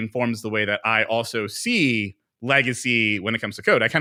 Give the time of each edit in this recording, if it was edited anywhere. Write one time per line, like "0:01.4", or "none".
none